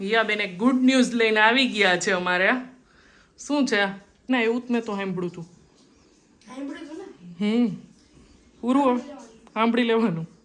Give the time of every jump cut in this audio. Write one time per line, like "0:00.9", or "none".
0:04.3